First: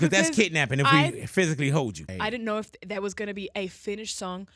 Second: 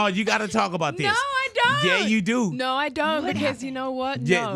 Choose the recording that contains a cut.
first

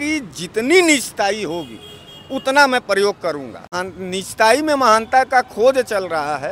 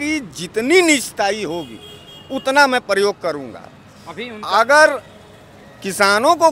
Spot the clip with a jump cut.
first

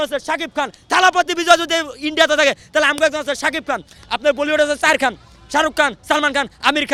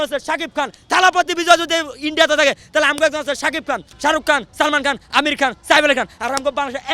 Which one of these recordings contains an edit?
second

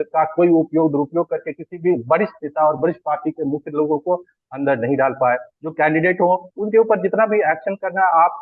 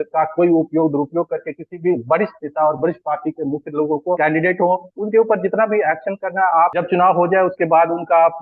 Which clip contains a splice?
second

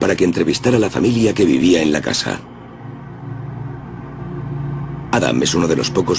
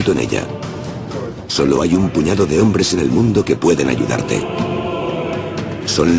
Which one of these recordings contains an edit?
second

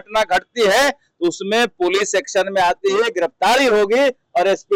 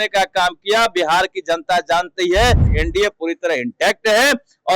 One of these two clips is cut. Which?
second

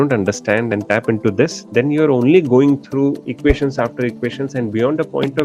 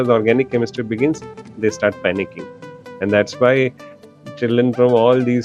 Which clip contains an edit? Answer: first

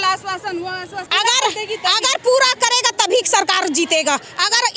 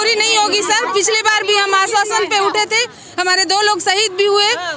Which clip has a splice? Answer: first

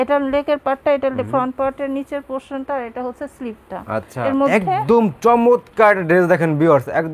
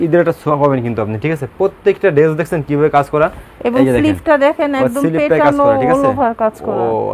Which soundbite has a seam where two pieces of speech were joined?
first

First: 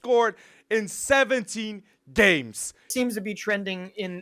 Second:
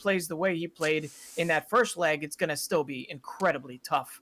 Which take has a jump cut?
first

